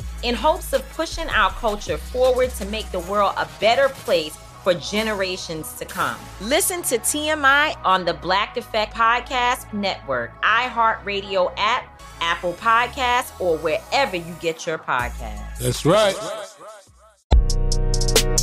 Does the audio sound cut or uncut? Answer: cut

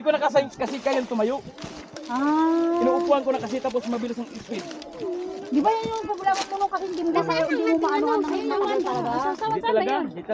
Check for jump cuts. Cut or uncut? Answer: uncut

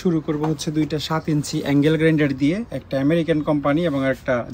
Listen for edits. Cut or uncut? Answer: uncut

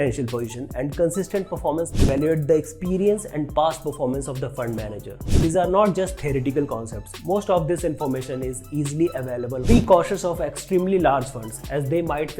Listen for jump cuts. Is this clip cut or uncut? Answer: cut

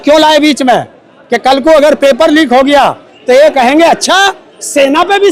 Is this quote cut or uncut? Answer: uncut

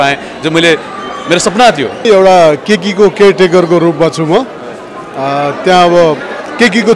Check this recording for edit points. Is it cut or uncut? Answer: cut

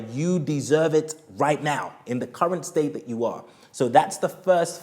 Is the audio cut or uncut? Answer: uncut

